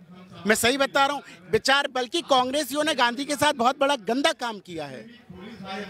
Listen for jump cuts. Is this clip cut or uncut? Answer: uncut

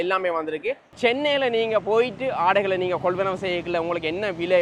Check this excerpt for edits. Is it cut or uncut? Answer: uncut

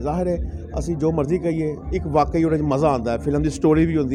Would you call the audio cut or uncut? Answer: uncut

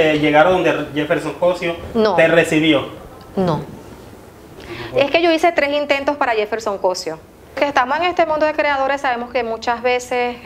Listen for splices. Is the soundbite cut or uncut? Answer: cut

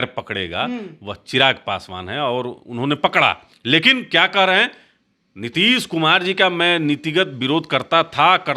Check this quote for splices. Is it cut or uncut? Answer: cut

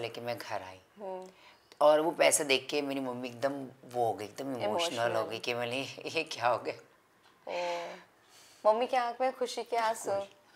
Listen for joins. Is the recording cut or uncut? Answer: uncut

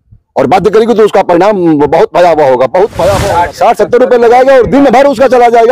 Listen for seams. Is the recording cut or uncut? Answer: cut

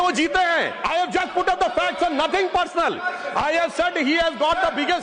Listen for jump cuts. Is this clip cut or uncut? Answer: uncut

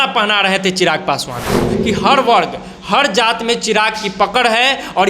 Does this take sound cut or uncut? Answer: cut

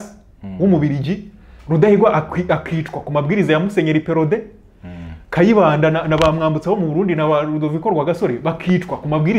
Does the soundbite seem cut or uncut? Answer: uncut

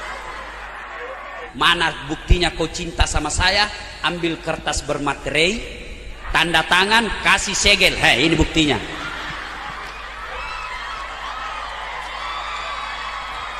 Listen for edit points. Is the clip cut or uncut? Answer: cut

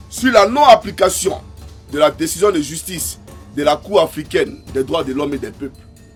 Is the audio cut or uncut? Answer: uncut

